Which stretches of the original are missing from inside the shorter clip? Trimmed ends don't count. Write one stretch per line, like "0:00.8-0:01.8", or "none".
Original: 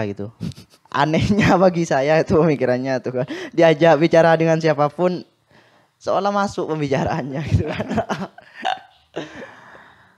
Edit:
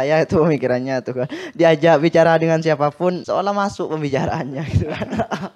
0:05.2-0:06.0